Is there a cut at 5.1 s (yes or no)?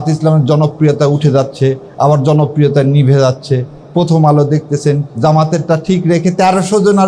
yes